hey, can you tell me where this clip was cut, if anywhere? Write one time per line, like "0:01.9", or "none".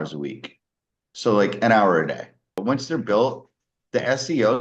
0:02.5